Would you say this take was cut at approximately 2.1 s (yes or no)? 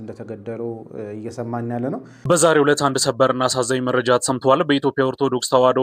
yes